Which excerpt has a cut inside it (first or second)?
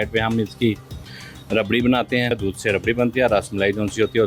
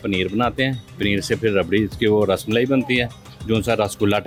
first